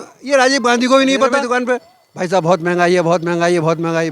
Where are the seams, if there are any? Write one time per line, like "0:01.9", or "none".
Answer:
0:01.4